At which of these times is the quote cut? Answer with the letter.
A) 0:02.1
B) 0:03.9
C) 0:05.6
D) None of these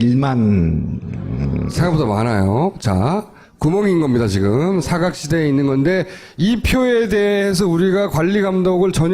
C